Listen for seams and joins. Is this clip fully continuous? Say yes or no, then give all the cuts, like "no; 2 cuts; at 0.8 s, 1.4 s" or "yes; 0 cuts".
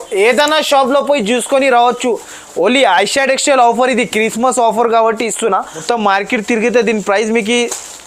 no; 1 cut; at 5.7 s